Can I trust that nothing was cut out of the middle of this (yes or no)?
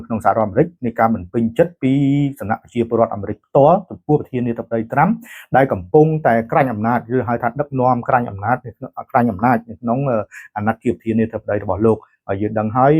yes